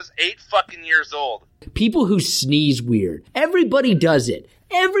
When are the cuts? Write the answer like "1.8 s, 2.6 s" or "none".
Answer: 1.7 s, 3.2 s